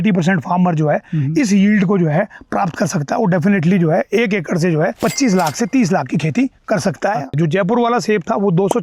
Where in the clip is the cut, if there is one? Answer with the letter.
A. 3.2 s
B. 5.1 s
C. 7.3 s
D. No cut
C